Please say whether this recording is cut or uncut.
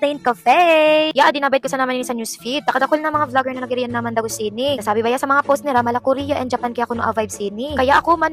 uncut